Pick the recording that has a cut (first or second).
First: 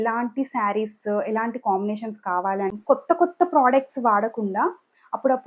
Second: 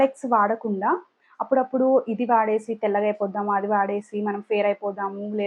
first